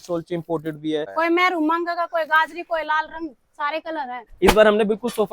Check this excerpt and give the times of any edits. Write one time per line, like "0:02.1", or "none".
0:01.1
0:04.1